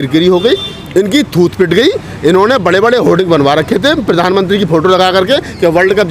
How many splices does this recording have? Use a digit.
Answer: 0